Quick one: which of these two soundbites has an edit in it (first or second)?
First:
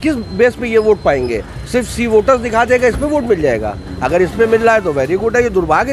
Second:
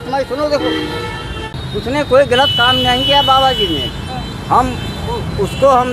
second